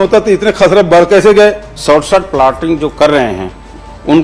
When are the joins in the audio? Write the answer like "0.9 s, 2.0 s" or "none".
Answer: 1.7 s